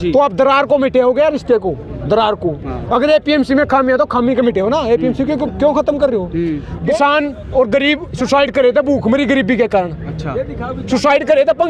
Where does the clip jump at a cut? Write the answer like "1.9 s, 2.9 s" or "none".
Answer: 6.9 s